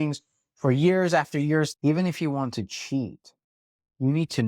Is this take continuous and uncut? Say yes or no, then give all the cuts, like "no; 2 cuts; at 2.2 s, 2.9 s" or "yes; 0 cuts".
no; 1 cut; at 1.7 s